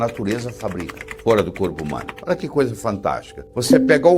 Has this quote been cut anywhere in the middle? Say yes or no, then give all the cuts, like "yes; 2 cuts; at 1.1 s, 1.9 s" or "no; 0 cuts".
no; 0 cuts